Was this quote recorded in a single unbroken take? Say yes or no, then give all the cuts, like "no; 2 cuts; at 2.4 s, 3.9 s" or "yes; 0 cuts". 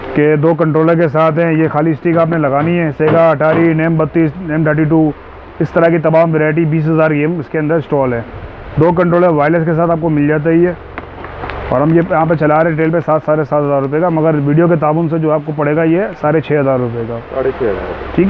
yes; 0 cuts